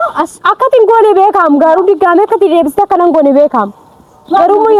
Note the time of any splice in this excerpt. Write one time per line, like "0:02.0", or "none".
none